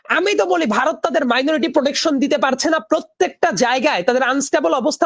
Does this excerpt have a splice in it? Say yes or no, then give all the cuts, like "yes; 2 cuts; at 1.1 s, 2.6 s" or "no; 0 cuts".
no; 0 cuts